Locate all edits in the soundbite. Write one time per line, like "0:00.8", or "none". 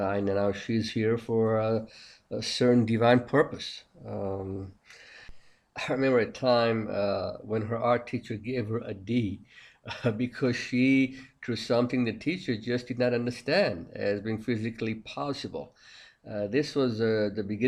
none